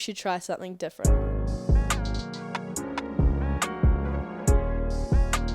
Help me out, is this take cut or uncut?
cut